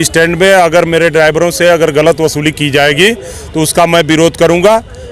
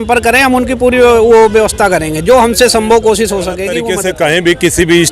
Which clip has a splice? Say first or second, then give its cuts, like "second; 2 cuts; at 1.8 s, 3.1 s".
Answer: second; 1 cut; at 3.9 s